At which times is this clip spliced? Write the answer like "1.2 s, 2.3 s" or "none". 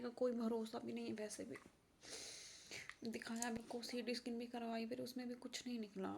3.6 s

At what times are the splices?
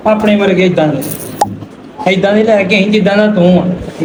none

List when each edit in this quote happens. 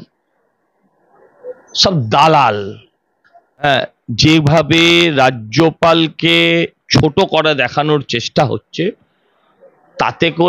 3.6 s

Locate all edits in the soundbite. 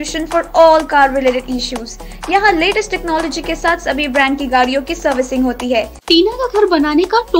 6.0 s

